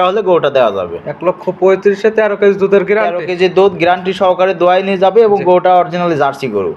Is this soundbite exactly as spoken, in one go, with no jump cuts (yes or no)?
yes